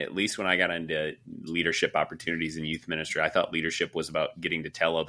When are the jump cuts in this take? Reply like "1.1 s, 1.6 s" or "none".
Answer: none